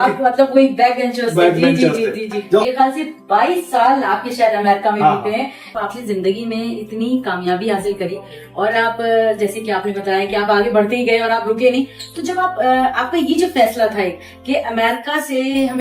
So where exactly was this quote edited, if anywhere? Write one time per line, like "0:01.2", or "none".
0:02.6
0:05.7

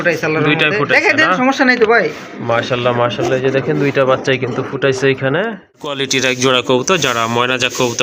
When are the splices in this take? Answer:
0:06.0

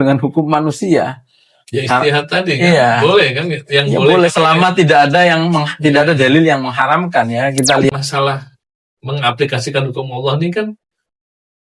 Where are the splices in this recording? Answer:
0:07.9

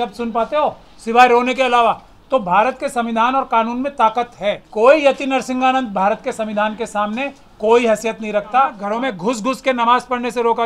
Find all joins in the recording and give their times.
0:04.6
0:08.8

